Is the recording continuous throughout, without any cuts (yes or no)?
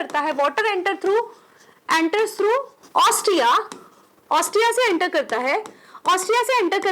no